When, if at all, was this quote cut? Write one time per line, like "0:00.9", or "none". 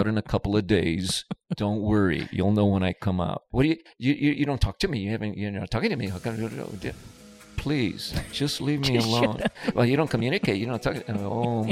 0:03.5